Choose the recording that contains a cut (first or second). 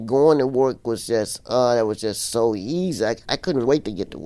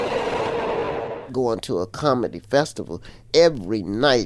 second